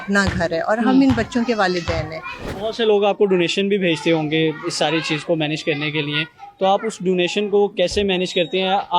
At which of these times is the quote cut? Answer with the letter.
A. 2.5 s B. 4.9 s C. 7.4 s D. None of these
A